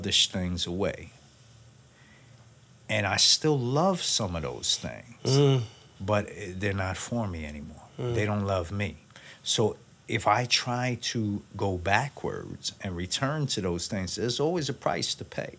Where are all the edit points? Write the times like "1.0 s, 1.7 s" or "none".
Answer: none